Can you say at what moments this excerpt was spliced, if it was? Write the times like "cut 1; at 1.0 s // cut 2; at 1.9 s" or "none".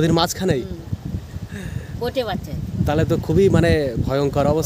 none